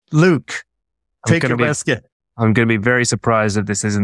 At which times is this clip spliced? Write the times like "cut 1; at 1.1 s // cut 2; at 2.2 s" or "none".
none